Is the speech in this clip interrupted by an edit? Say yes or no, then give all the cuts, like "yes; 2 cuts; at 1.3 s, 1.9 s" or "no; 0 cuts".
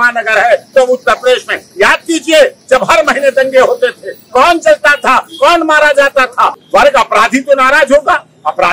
yes; 1 cut; at 6.6 s